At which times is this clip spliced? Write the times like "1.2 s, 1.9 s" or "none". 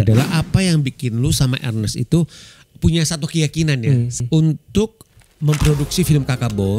4.2 s